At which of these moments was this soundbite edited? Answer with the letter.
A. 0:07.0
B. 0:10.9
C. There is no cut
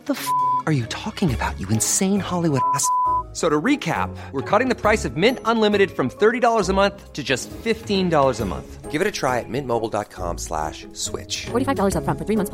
C